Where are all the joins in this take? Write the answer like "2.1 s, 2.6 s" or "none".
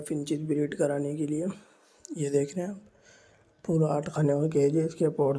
none